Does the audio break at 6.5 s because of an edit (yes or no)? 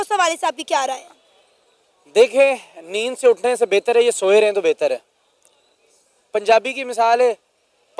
no